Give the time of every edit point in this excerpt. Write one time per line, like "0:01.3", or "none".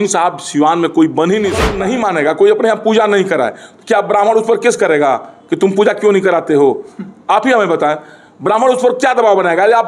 0:01.8